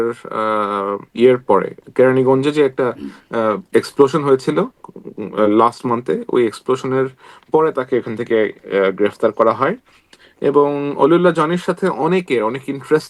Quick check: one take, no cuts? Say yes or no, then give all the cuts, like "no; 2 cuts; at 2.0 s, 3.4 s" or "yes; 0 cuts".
yes; 0 cuts